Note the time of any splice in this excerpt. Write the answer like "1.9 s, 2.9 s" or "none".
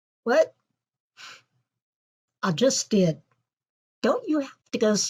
1.8 s